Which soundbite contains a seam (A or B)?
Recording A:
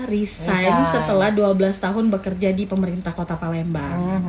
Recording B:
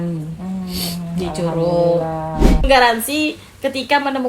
B